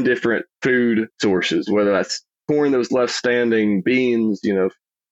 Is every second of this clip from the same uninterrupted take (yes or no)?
no